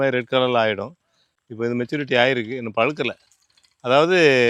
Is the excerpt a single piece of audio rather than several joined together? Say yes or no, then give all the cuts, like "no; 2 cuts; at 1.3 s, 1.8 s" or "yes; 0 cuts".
yes; 0 cuts